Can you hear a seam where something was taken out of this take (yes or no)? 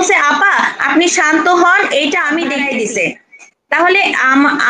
yes